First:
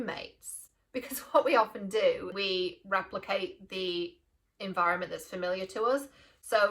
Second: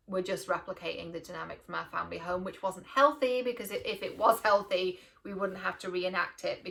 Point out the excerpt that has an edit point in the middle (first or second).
first